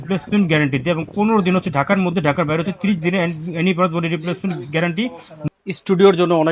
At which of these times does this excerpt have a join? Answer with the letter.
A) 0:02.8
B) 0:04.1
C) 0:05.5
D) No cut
C